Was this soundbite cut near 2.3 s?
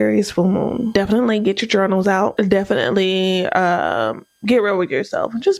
yes; 2 cuts; at 0.9 s, 2.3 s

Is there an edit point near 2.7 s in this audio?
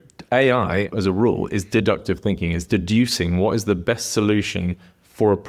yes; 2 cuts; at 0.9 s, 2.7 s

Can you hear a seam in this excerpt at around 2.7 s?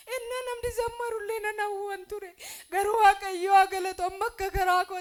no; 0 cuts

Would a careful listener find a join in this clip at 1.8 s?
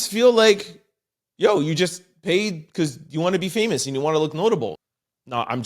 no; 1 cut; at 4.7 s

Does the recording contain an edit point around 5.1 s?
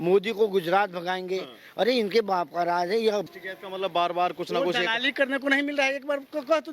no; 1 cut; at 3.3 s

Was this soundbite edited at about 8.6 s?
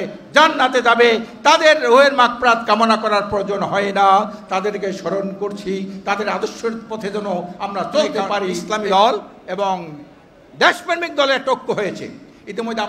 yes; 1 cut; at 8.6 s

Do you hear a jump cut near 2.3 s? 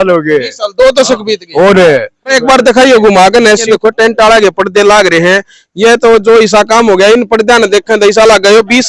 yes; 2 cuts; at 2.3 s, 3.6 s

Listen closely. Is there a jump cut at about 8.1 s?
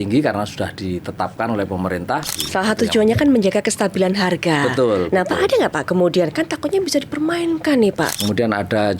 yes; 2 cuts; at 2.4 s, 8.1 s

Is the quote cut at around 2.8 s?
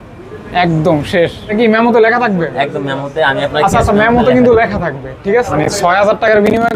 no; 2 cuts; at 1.5 s, 5.5 s

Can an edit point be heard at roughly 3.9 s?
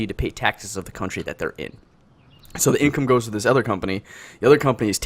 yes; 1 cut; at 3.9 s

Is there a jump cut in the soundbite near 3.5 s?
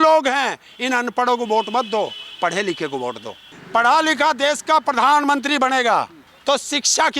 yes; 2 cuts; at 3.5 s, 6.2 s

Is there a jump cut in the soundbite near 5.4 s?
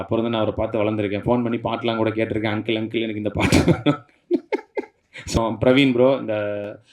yes; 1 cut; at 5.4 s

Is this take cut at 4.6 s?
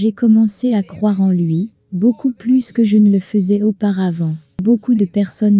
yes; 1 cut; at 4.6 s

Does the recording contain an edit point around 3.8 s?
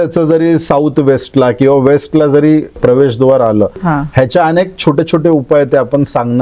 yes; 2 cuts; at 2.8 s, 3.8 s

